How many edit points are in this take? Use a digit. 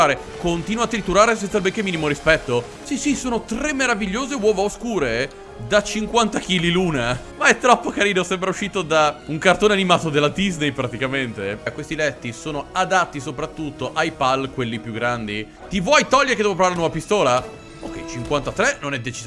4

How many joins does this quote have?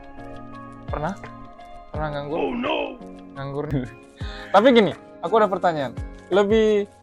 1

